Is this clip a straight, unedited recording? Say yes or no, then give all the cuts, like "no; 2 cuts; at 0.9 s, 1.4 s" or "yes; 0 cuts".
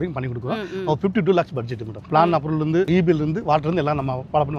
no; 2 cuts; at 2.0 s, 2.9 s